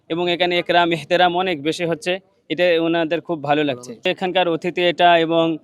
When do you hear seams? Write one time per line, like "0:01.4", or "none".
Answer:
0:04.0